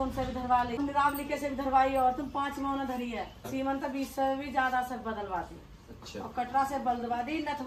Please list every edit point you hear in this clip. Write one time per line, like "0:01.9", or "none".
0:00.8
0:03.5